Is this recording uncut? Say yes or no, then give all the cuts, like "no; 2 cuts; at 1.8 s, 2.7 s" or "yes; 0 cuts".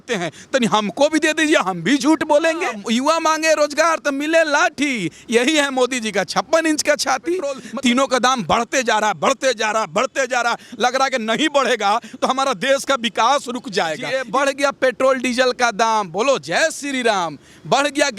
no; 3 cuts; at 2.8 s, 7.6 s, 14.1 s